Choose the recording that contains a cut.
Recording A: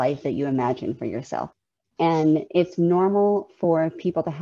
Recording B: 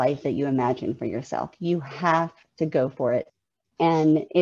A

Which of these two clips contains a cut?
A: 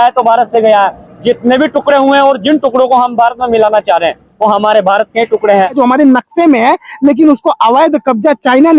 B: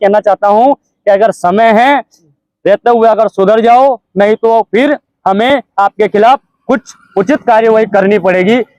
A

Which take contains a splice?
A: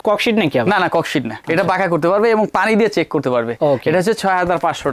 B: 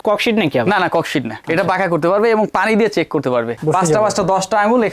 B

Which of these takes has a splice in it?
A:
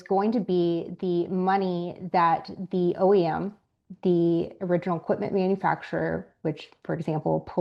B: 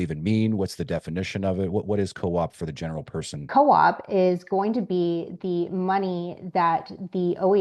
B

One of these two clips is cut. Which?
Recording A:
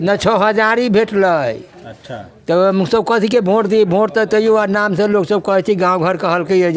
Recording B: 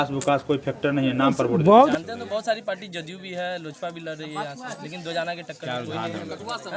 B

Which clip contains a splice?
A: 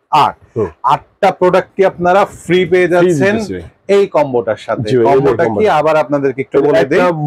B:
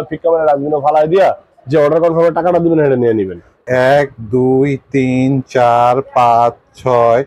B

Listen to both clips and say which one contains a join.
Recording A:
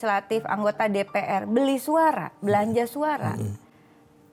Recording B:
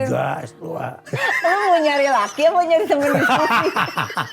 B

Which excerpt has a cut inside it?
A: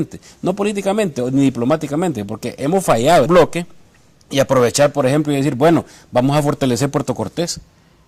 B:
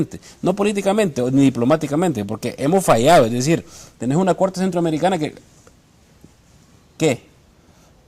B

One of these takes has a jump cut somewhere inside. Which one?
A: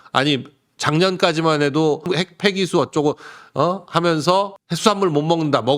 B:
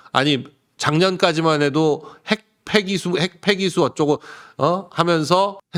A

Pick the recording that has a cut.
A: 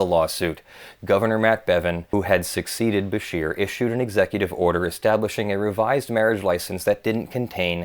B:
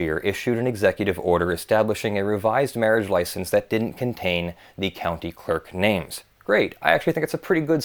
A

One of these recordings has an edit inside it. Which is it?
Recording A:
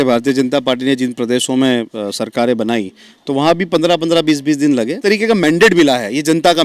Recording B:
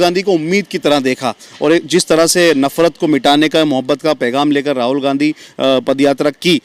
A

